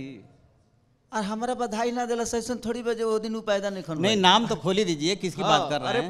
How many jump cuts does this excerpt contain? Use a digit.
0